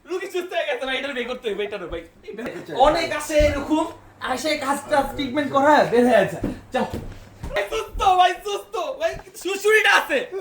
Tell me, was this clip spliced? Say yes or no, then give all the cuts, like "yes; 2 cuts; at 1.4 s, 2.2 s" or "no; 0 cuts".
yes; 2 cuts; at 2.6 s, 7.6 s